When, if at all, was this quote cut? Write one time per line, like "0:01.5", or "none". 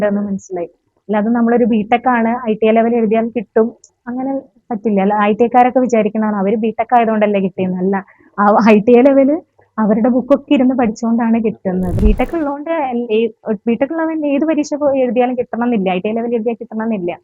0:12.0